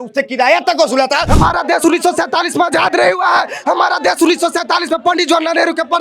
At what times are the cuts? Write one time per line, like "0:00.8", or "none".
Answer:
0:01.3